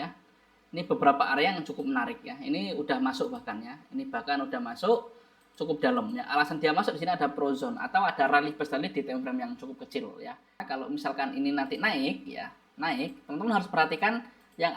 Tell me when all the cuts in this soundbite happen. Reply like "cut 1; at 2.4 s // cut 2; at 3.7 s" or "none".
cut 1; at 10.7 s